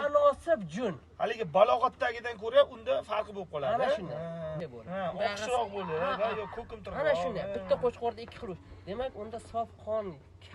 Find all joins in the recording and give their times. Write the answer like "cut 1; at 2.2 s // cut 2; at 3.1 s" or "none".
cut 1; at 4.5 s